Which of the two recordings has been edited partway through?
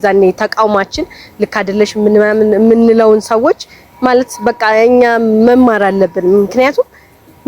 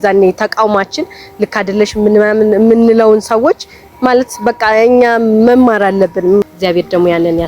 second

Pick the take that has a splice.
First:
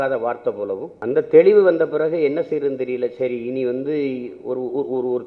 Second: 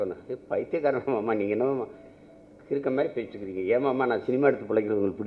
first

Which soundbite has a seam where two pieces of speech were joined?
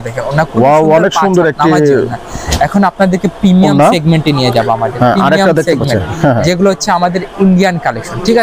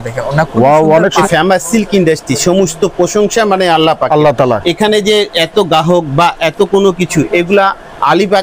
second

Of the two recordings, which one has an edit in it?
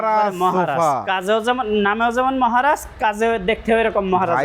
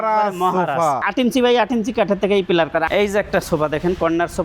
second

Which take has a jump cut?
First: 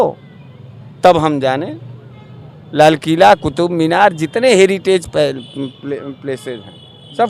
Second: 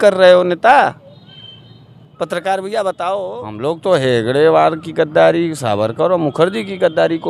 second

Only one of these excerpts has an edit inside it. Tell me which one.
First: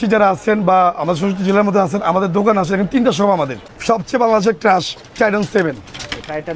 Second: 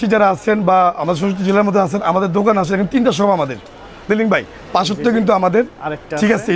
first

